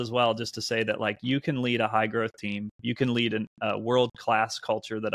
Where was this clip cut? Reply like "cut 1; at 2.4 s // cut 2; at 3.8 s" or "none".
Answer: none

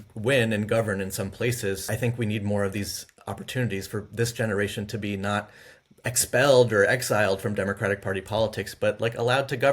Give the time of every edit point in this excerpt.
cut 1; at 1.8 s

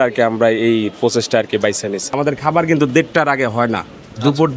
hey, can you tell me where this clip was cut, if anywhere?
cut 1; at 2.1 s

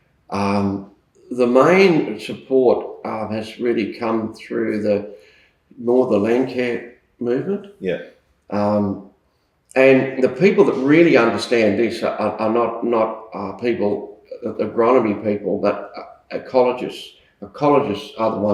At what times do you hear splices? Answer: none

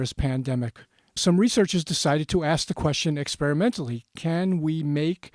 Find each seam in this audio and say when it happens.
cut 1; at 1.2 s

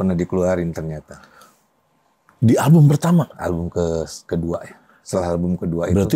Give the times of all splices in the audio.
none

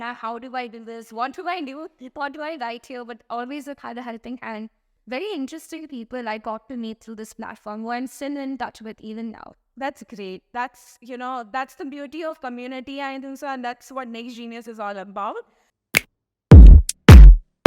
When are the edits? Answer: cut 1; at 4.9 s // cut 2; at 15.9 s

